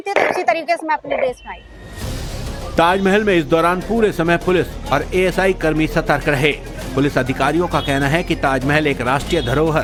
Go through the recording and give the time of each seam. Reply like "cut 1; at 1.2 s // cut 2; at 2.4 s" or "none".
none